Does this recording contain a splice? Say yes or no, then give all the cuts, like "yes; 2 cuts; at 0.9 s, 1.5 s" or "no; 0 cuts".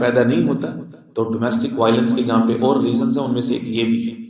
no; 0 cuts